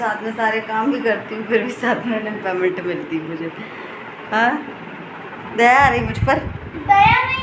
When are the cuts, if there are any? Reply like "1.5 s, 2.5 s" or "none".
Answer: none